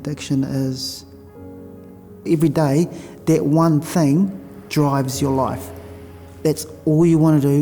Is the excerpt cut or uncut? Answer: uncut